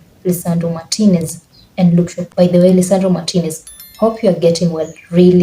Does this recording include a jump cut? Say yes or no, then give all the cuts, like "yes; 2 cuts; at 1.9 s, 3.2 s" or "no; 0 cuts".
yes; 1 cut; at 2.2 s